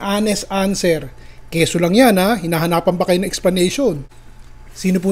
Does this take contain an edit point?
no; 0 cuts

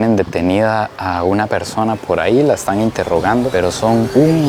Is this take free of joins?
yes; 0 cuts

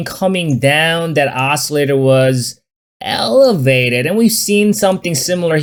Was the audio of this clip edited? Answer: no; 0 cuts

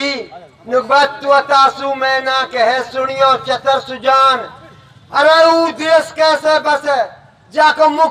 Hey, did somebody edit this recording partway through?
no; 0 cuts

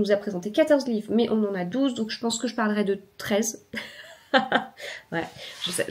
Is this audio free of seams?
yes; 0 cuts

